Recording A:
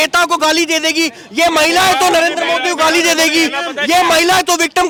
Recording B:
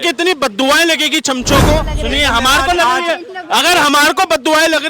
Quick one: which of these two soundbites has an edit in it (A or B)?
B